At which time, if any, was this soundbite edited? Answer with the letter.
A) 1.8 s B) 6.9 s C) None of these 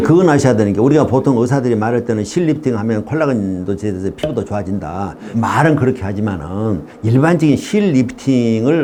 C